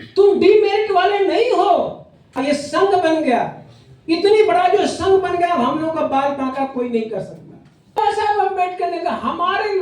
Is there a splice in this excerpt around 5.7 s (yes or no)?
no